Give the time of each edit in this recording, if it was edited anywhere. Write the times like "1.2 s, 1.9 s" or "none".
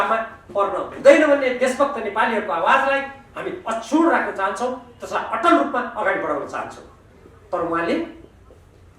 none